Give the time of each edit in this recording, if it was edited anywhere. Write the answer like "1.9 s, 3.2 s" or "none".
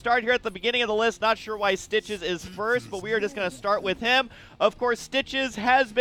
3.8 s

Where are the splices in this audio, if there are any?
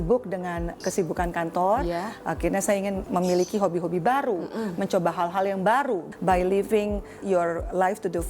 0.8 s, 3.0 s, 6.1 s, 7.2 s

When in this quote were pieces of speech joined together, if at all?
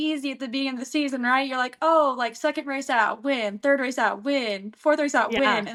none

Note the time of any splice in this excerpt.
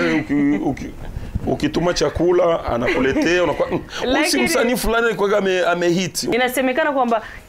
6.3 s

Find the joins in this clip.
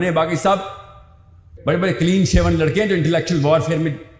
1.5 s

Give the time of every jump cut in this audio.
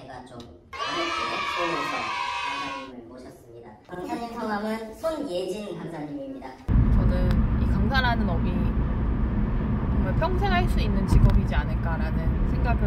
6.7 s

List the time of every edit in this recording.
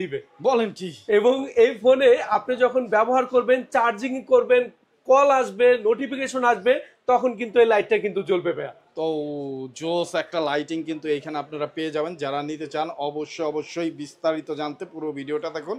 none

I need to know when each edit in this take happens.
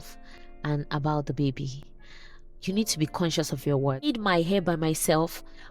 4.1 s

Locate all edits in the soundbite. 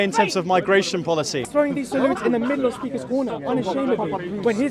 1.4 s

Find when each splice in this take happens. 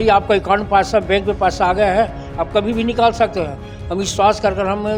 none

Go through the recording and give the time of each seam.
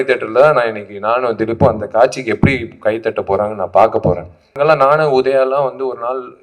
4.6 s

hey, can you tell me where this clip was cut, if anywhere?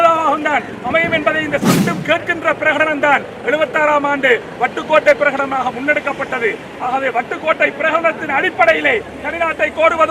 1.8 s

